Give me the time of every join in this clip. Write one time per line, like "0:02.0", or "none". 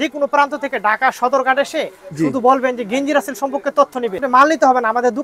0:04.2